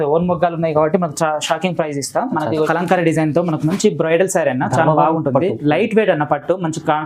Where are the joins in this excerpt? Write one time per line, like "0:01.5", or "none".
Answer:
0:02.7